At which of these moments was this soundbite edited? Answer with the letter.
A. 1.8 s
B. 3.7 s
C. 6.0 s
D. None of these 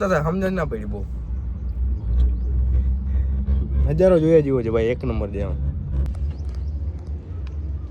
C